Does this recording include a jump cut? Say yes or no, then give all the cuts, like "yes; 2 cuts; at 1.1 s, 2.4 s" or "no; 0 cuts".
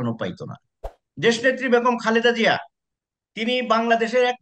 yes; 1 cut; at 1.0 s